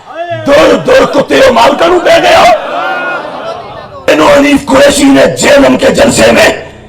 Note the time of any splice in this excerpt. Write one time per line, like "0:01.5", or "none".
0:04.1

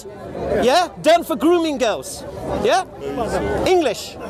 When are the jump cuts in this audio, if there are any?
none

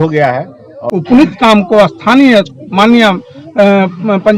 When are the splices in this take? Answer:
0:00.9

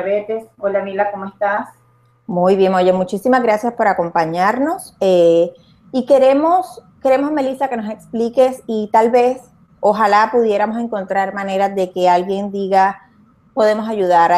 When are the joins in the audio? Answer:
0:06.0

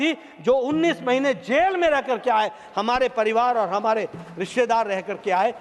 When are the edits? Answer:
none

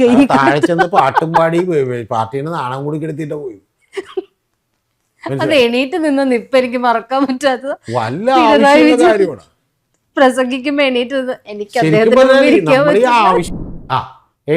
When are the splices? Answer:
0:13.5

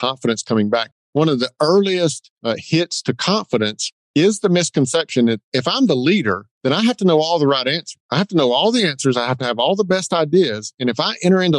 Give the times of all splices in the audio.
0:05.5

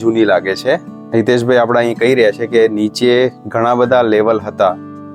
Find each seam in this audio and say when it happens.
0:00.9

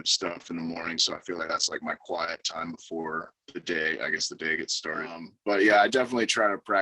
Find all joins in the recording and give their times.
0:05.3

